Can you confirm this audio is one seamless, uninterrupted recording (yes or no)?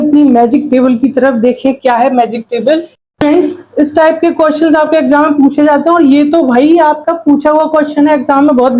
no